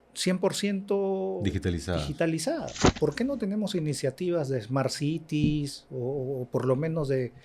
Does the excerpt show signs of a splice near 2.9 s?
yes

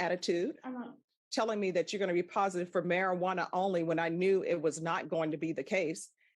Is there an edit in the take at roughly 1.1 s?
yes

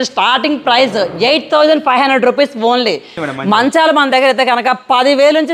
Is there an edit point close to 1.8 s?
no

